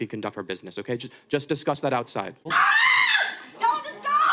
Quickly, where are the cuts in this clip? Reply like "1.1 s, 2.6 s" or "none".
2.5 s